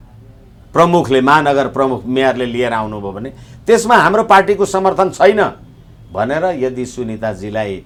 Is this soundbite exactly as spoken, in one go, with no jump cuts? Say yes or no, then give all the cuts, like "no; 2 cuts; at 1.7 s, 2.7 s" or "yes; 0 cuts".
yes; 0 cuts